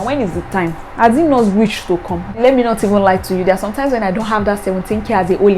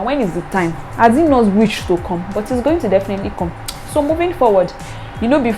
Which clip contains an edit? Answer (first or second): first